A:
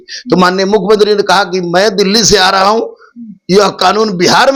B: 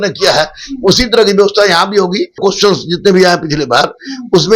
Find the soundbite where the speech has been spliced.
B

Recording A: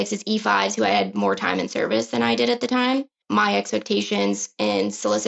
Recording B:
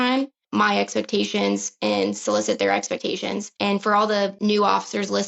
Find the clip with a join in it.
B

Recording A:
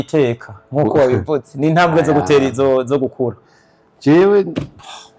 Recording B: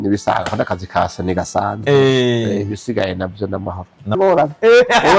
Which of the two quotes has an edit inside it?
B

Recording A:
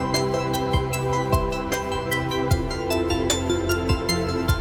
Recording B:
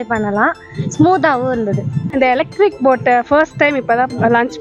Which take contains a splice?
B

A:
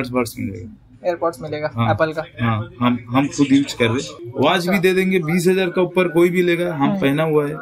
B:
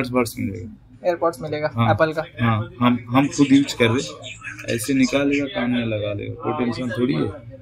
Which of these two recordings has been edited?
A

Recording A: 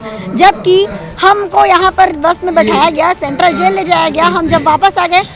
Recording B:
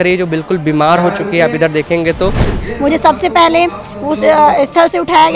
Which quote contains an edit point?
B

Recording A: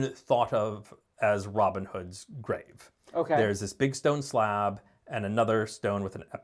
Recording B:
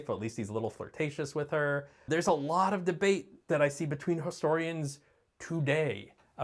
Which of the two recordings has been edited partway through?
B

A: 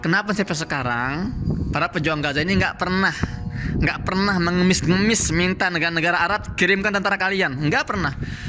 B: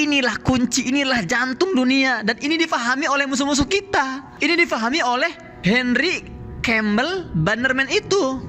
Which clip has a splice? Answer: B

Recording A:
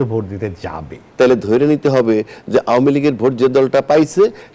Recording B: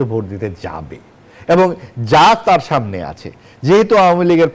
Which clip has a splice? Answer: A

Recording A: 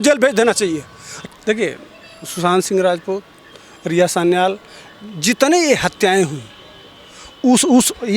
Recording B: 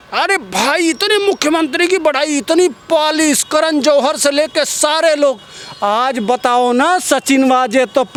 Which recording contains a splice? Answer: A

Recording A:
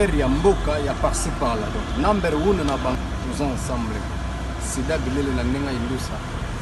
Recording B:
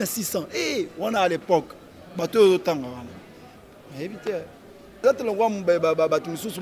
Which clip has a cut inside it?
B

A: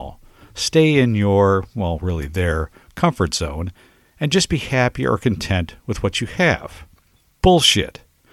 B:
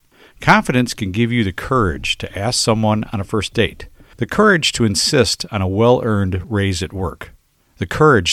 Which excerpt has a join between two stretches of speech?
B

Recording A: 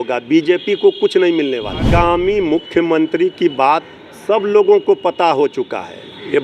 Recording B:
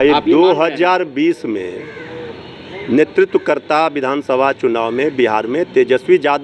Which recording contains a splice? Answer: A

